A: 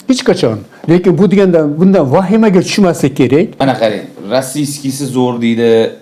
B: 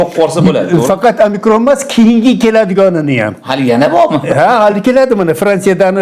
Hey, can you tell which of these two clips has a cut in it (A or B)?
A